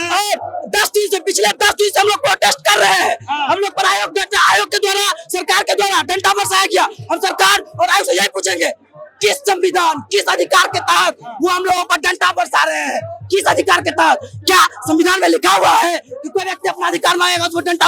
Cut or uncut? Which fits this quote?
uncut